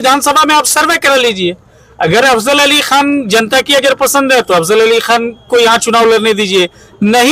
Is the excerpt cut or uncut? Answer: uncut